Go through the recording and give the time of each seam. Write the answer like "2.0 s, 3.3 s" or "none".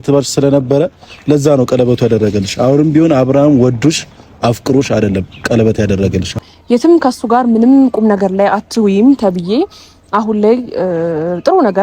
6.3 s